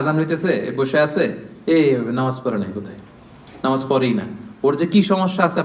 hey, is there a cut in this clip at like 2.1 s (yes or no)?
no